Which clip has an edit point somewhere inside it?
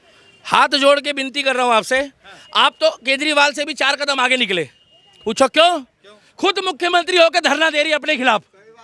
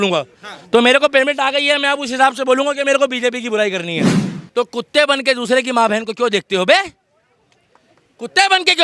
second; 1 cut; at 4.2 s

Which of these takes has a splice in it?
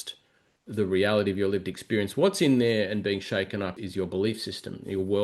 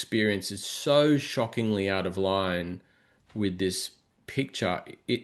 first; 1 cut; at 3.7 s

